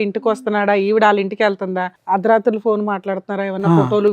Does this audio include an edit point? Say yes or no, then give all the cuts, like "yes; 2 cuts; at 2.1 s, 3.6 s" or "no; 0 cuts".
yes; 1 cut; at 1.9 s